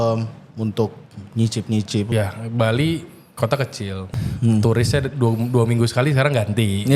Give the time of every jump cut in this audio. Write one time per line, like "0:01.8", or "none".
0:02.1
0:04.0